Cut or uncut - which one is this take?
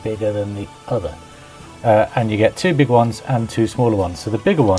uncut